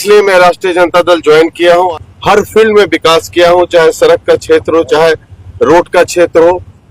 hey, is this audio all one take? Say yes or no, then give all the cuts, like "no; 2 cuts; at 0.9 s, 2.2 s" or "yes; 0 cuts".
no; 1 cut; at 1.9 s